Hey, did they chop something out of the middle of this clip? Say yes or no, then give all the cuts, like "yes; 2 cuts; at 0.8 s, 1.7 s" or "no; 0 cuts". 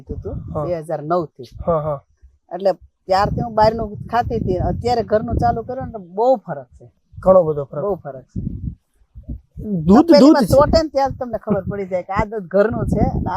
no; 0 cuts